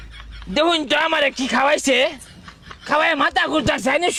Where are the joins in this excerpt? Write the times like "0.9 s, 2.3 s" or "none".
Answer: none